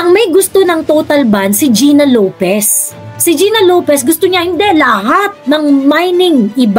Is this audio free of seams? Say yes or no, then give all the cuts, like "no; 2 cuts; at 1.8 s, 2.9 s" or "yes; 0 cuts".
yes; 0 cuts